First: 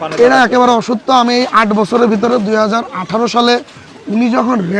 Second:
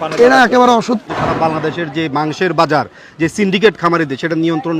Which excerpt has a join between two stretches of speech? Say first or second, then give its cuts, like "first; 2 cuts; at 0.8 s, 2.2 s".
second; 1 cut; at 1.0 s